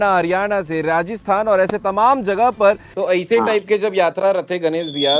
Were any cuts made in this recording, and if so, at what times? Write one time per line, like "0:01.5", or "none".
0:02.9